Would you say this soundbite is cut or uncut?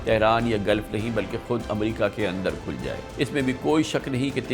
cut